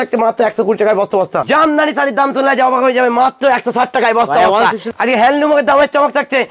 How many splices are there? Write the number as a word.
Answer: two